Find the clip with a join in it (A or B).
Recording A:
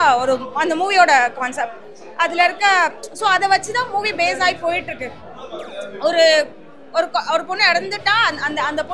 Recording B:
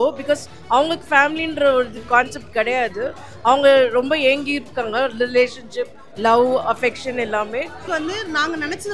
B